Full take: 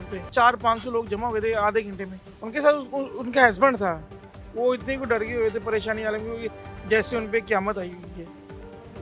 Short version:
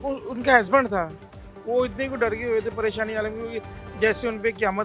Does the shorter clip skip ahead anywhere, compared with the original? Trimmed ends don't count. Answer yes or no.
no